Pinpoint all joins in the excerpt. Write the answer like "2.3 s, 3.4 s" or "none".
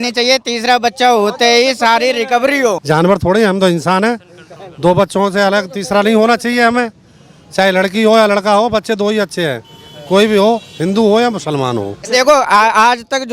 2.8 s, 12.0 s